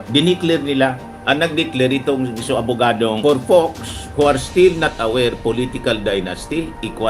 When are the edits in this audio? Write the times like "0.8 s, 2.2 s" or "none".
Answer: 3.2 s